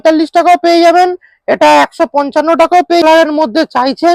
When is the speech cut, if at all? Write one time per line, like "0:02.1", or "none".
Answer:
0:03.0

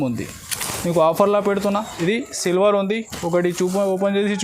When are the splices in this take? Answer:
0:01.9

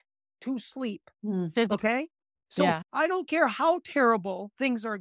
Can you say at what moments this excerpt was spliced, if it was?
0:02.9

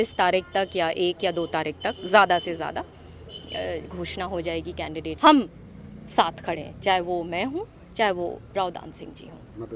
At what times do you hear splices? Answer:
0:05.2

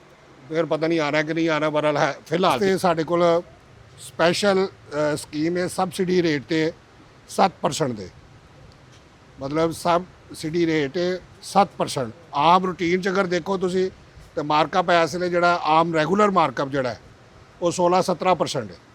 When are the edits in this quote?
0:02.6

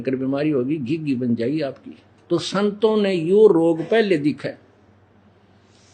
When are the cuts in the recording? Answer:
0:02.1

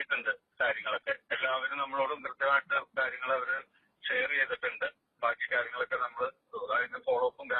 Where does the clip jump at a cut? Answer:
none

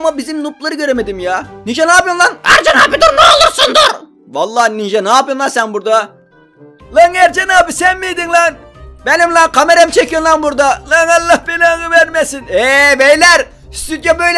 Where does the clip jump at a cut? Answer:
none

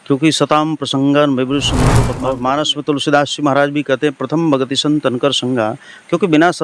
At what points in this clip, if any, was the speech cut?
0:01.9

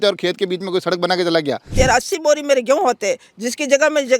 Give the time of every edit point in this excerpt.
0:01.7

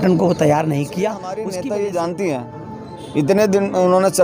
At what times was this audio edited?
0:01.3

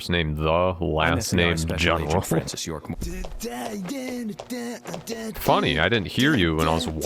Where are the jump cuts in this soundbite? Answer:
0:03.4

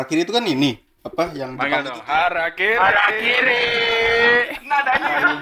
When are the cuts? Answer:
none

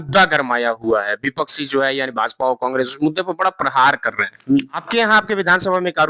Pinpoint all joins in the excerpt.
0:04.8

